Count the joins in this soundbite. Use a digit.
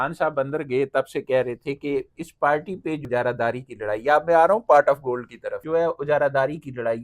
2